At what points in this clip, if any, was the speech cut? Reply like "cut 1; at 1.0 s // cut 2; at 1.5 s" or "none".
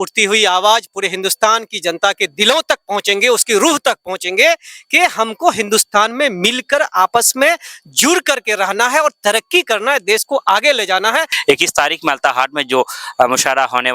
cut 1; at 11.3 s